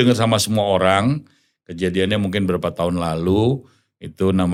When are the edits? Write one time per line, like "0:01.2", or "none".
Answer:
none

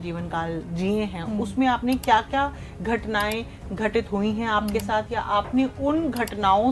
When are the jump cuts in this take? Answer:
none

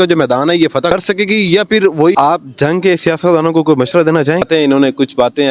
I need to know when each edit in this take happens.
0:00.9
0:02.1
0:04.4

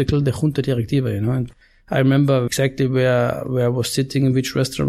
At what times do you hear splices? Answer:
0:01.5
0:02.5

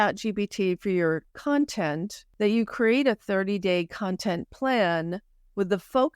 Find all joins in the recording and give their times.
0:01.3
0:02.2

